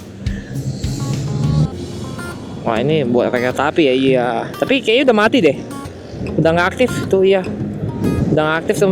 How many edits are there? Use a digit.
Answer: 1